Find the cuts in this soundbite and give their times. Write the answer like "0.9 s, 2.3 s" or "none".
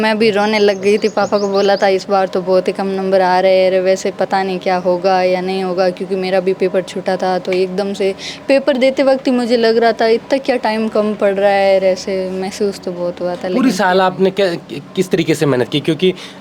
none